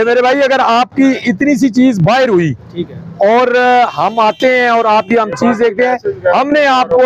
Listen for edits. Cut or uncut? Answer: uncut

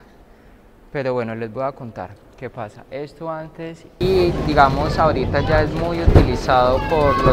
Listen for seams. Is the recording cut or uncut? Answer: cut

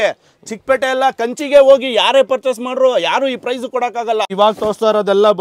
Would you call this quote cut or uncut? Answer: cut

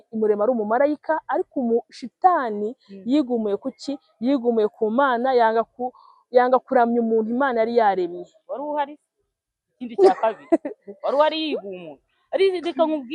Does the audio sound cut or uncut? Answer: uncut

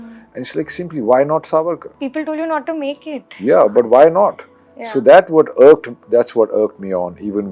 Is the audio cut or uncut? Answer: uncut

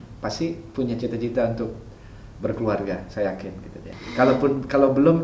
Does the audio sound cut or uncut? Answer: cut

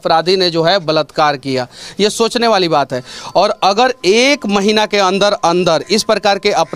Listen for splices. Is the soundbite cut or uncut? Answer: uncut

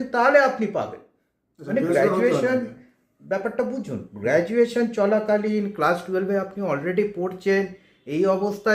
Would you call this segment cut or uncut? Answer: uncut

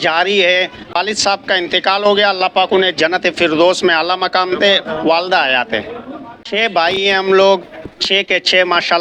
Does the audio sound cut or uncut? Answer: cut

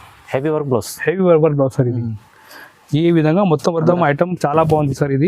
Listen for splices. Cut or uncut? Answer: cut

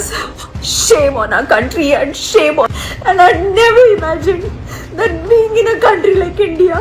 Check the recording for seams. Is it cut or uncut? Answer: cut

